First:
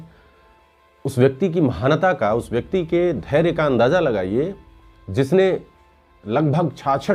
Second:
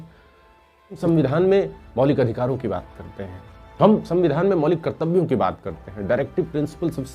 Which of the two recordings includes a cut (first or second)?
second